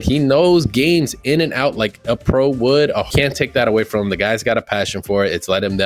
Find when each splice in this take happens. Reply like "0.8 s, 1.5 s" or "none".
3.0 s